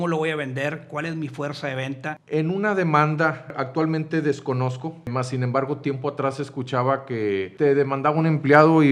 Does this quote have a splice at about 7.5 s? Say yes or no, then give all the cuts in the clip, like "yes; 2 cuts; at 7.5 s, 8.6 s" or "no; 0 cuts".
yes; 4 cuts; at 2.1 s, 3.6 s, 5.1 s, 7.5 s